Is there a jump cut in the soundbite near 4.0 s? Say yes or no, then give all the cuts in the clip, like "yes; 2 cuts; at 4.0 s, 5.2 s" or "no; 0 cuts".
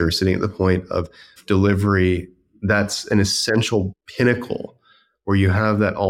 yes; 2 cuts; at 1.4 s, 4.0 s